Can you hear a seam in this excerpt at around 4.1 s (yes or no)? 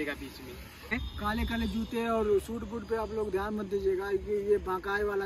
no